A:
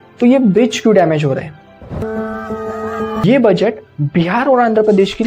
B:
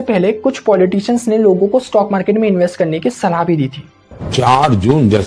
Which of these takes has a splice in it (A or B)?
A